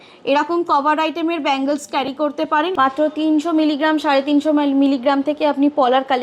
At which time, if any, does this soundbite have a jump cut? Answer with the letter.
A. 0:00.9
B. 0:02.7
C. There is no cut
B